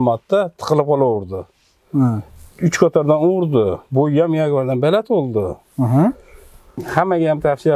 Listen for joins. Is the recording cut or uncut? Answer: cut